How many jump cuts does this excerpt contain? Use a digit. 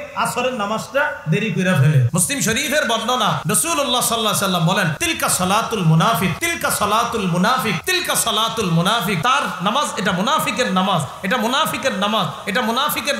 6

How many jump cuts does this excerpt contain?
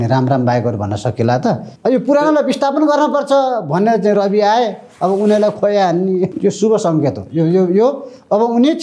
2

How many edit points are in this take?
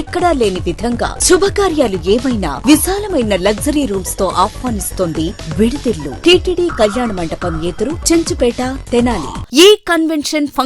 2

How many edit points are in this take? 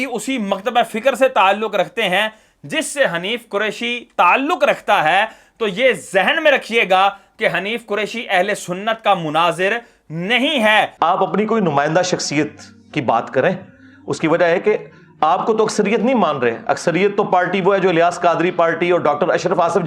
1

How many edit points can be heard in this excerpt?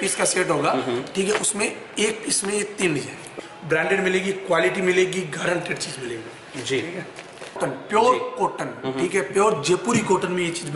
2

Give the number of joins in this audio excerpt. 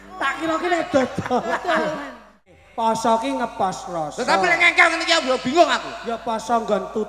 1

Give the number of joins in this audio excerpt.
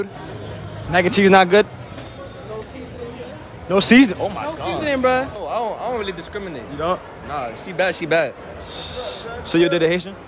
1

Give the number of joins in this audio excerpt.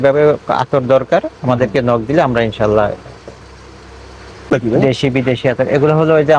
0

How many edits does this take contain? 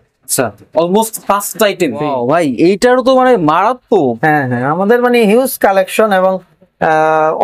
1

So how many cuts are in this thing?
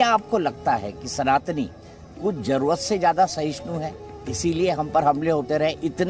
0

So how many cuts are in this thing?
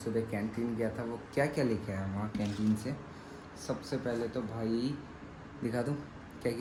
0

